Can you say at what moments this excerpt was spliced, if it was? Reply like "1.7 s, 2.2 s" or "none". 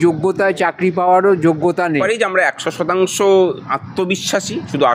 1.9 s